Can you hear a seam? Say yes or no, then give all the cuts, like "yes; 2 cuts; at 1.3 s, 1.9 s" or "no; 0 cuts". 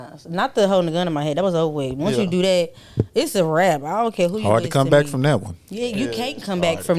no; 0 cuts